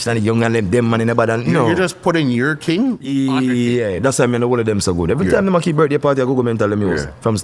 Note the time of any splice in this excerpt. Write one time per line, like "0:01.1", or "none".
none